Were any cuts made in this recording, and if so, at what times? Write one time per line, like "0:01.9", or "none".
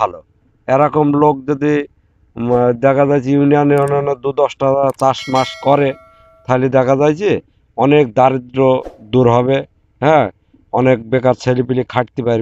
none